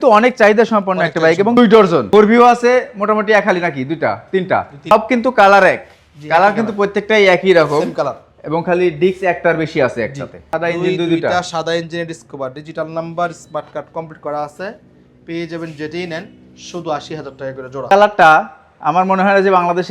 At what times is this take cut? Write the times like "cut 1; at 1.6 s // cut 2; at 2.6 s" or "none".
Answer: cut 1; at 1.6 s // cut 2; at 4.9 s // cut 3; at 10.3 s // cut 4; at 17.9 s